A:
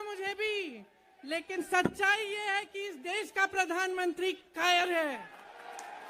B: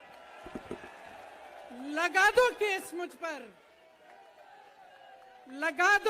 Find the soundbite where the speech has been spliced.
B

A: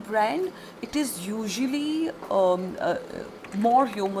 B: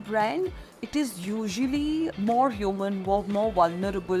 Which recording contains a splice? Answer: B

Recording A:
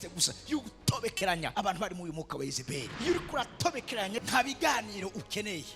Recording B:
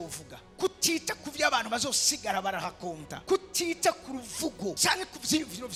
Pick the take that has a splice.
A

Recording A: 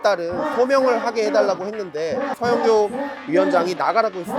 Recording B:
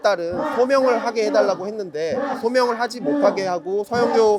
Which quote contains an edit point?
A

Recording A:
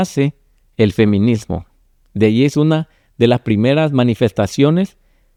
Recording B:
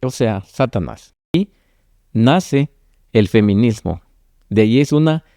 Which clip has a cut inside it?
B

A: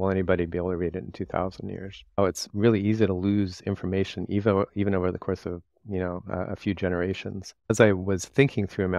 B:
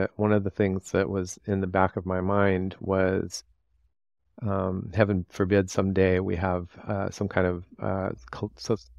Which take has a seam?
A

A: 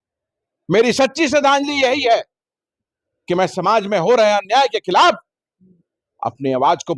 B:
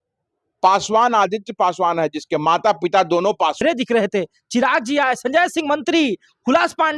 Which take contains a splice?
B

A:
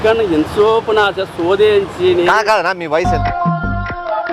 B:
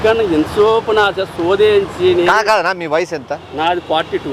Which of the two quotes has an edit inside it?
A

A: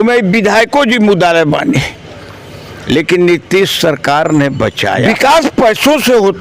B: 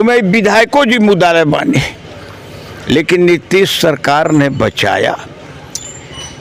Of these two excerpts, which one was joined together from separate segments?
A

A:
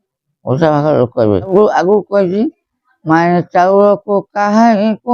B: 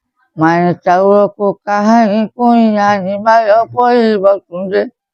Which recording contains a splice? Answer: A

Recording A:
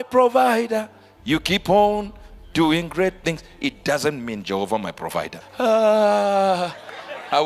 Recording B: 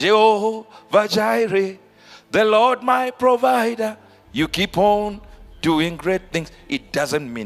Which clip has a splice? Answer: A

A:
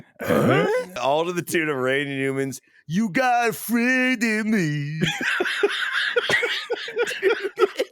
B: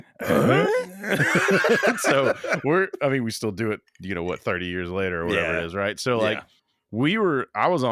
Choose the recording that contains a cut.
A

